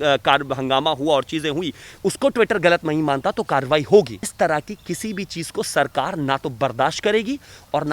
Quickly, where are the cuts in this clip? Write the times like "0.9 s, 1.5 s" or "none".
4.3 s